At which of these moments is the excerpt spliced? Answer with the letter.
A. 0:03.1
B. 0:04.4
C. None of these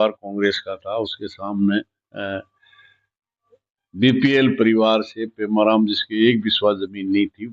C